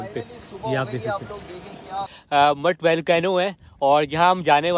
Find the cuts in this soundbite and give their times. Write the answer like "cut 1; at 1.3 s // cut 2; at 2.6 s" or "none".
cut 1; at 2.1 s